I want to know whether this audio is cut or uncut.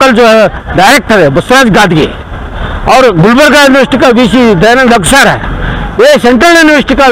uncut